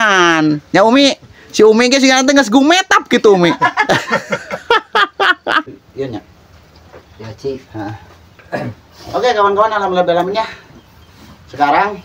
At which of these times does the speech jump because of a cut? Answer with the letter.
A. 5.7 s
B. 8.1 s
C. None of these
A